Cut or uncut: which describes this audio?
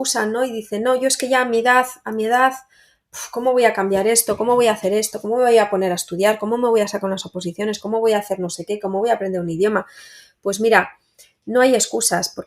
uncut